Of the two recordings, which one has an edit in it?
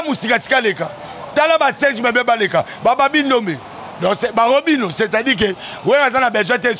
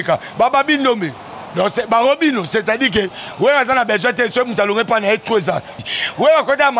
second; 1 cut; at 5.7 s

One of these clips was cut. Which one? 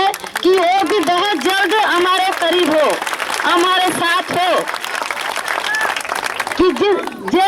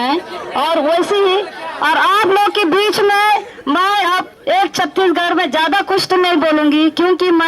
second; 1 cut; at 5.9 s

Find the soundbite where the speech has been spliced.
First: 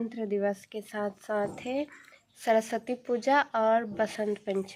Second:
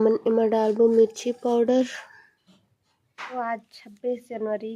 second; 1 cut; at 3.3 s

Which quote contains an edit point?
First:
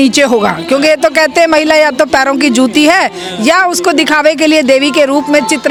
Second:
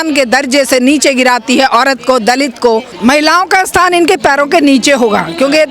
second; 1 cut; at 2.9 s

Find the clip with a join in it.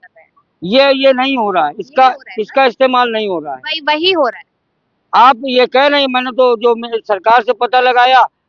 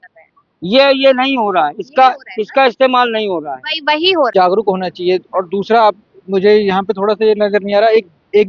second; 1 cut; at 4.3 s

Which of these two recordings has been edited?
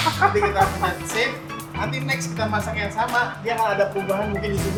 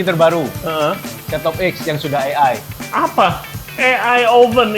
second; 1 cut; at 2.8 s

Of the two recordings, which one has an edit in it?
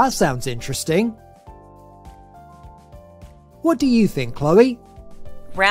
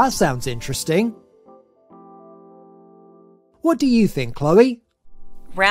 first; 2 cuts; at 1.2 s, 3.5 s

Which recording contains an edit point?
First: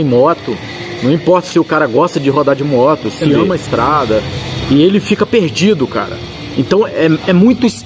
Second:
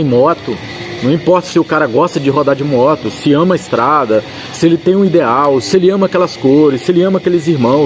first; 1 cut; at 4.4 s

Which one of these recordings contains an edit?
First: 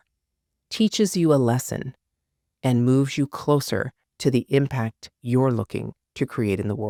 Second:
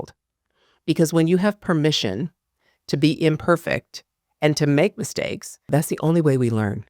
second; 1 cut; at 5.7 s

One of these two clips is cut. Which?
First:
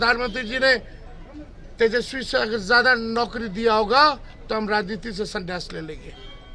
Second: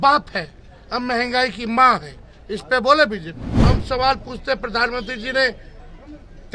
second; 1 cut; at 3.5 s

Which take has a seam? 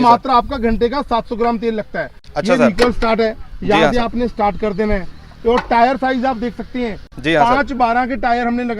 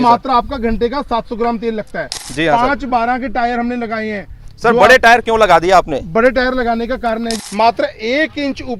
second; 2 cuts; at 2.2 s, 7.4 s

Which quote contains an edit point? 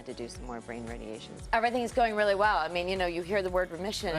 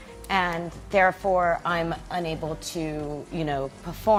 first; 1 cut; at 1.5 s

